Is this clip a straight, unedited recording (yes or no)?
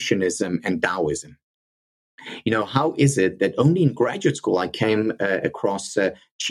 yes